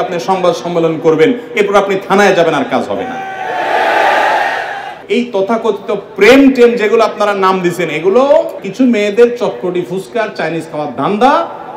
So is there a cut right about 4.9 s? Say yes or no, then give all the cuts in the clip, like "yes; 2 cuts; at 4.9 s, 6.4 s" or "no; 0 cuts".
yes; 2 cuts; at 4.9 s, 8.6 s